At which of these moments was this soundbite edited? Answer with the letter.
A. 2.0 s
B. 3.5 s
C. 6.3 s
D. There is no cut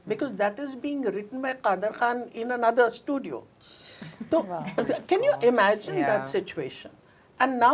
D